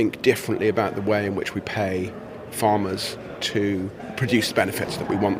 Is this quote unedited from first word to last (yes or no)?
yes